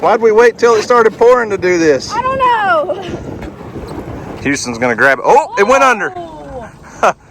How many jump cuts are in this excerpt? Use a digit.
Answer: 1